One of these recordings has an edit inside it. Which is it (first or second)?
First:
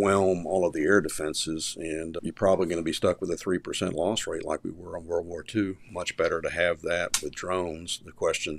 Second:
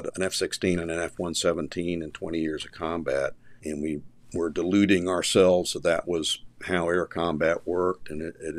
second